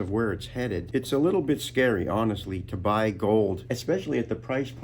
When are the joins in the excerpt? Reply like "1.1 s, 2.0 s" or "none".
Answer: 0.8 s, 3.7 s